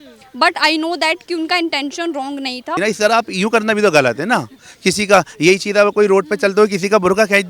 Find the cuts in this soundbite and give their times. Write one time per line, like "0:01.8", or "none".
0:02.8

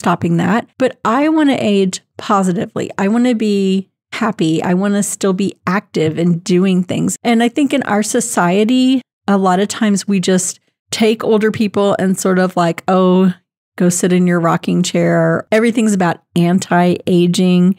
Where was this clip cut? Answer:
0:07.1
0:15.4

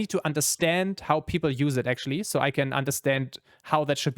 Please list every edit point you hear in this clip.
none

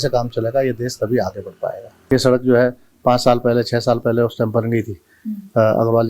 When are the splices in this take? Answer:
0:01.9

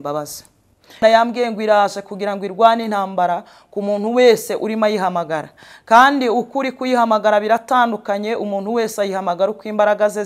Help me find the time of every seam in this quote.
0:01.0

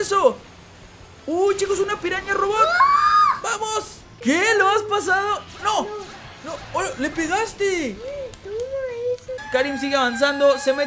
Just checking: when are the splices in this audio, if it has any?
0:04.0
0:09.4

